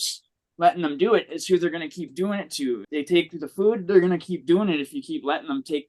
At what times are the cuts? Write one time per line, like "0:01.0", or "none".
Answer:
0:02.8